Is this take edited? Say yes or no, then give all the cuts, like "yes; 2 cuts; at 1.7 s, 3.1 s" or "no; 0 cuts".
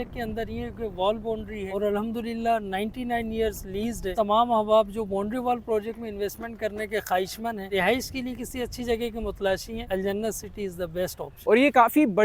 yes; 5 cuts; at 1.7 s, 4.1 s, 7.7 s, 9.8 s, 11.4 s